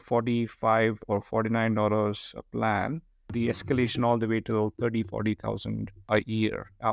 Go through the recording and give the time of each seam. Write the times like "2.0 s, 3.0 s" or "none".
none